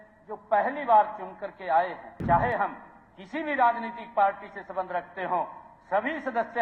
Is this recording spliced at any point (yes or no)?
yes